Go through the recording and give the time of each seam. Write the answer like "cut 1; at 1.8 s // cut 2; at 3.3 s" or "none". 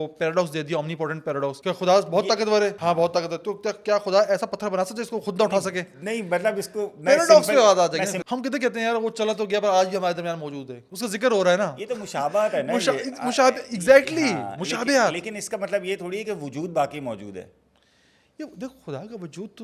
cut 1; at 1.6 s // cut 2; at 2.8 s // cut 3; at 8.2 s